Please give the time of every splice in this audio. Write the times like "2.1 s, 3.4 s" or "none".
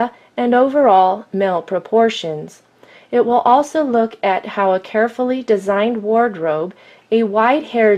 1.8 s